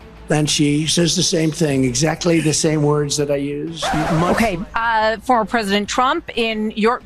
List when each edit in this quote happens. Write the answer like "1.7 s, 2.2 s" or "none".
3.8 s